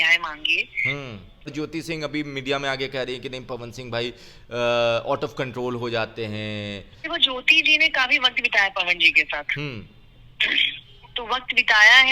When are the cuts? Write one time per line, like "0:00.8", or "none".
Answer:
0:01.5
0:07.0